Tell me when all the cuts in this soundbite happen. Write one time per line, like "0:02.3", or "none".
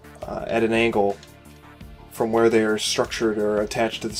none